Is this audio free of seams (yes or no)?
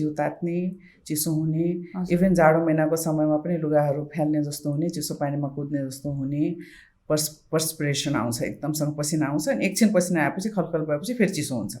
yes